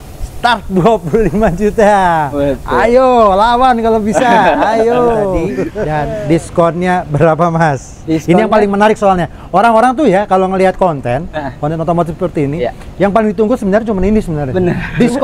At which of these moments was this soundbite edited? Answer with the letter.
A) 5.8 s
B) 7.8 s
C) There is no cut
A